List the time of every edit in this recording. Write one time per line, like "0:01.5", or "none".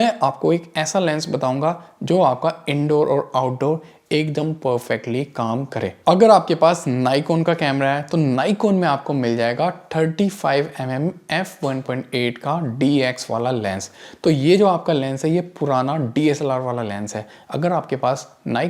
none